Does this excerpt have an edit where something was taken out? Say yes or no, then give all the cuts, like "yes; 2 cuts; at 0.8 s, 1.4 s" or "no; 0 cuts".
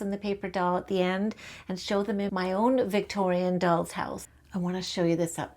yes; 2 cuts; at 2.3 s, 4.3 s